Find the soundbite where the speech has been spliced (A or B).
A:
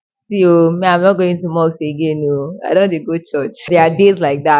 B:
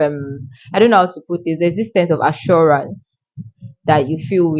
A